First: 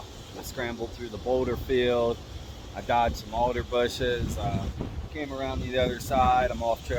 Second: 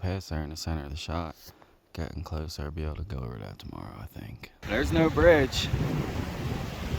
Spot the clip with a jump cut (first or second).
second